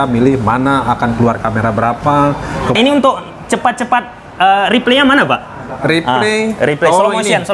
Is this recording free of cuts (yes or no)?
no